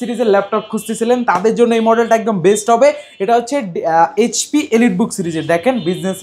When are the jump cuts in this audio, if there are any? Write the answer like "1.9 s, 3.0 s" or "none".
none